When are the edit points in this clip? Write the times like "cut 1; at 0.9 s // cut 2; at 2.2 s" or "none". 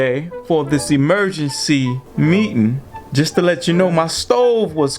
cut 1; at 2.0 s // cut 2; at 2.9 s